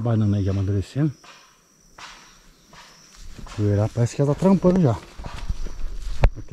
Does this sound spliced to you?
no; 0 cuts

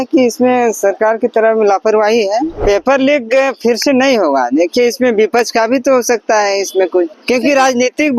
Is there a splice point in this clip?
yes; 2 cuts; at 2.6 s, 7.2 s

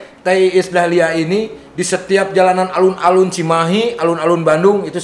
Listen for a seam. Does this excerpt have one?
no; 0 cuts

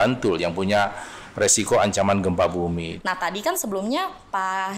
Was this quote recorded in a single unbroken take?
no; 1 cut; at 2.9 s

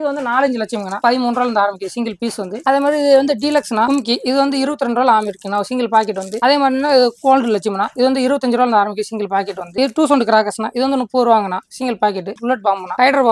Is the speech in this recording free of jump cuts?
yes; 0 cuts

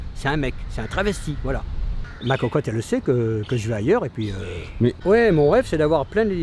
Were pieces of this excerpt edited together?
yes; 2 cuts; at 2.1 s, 5.0 s

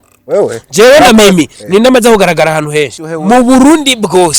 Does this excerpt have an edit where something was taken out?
yes; 1 cut; at 3.0 s

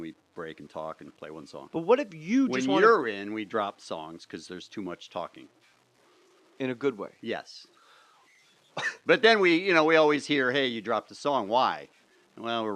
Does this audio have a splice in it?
no; 0 cuts

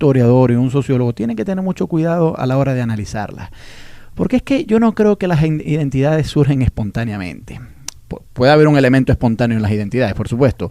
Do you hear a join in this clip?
yes; 1 cut; at 8.6 s

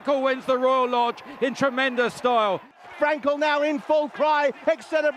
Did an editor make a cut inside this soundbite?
yes; 1 cut; at 2.8 s

